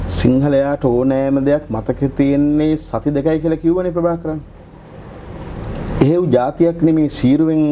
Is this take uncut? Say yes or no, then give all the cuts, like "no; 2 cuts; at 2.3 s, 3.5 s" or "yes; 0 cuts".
yes; 0 cuts